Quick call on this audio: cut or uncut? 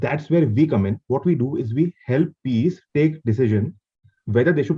uncut